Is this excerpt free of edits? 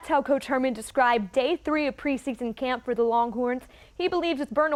yes; 0 cuts

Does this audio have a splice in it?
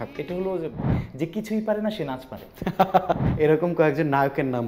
yes; 2 cuts; at 1.0 s, 3.2 s

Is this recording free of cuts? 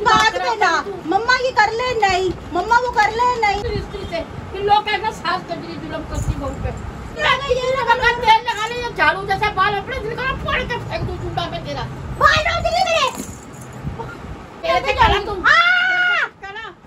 no; 4 cuts; at 3.6 s, 6.2 s, 7.2 s, 14.6 s

